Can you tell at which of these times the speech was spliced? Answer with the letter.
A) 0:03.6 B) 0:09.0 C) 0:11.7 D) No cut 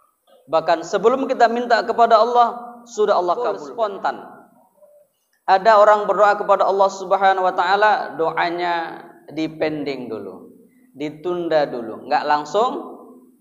A